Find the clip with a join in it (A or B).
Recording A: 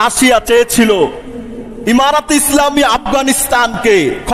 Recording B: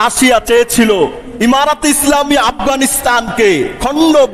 B